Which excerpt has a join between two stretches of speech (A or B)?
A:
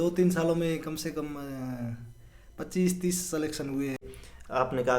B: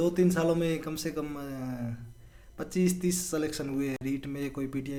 A